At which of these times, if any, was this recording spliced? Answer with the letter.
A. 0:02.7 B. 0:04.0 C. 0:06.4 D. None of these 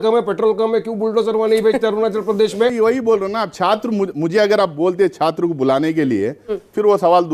A